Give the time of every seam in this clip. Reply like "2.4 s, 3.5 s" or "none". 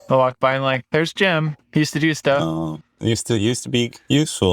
1.6 s, 2.8 s